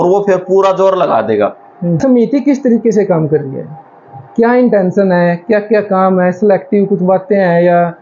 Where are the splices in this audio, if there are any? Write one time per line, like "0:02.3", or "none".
0:02.0